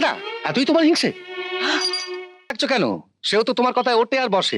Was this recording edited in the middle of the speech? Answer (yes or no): yes